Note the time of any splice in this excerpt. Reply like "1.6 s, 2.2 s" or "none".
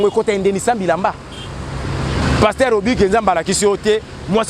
2.2 s